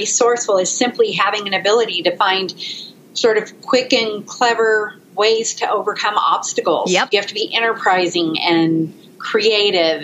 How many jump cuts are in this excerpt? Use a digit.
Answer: 0